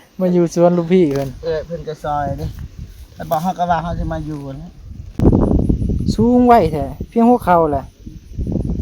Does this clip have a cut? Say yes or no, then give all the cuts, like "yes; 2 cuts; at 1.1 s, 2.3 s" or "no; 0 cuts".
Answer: yes; 1 cut; at 5.2 s